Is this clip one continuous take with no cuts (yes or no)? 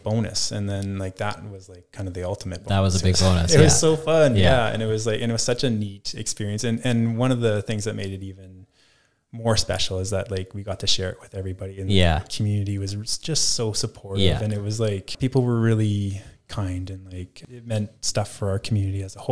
no